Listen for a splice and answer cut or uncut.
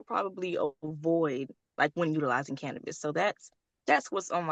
uncut